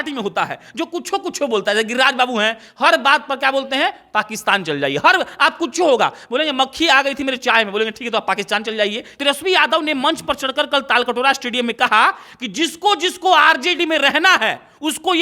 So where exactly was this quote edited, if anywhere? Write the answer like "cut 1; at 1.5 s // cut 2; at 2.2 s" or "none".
cut 1; at 9.2 s